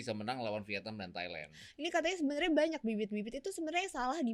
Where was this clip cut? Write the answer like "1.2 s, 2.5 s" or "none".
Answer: 1.6 s